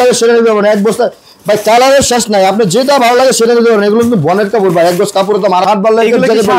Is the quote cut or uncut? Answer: cut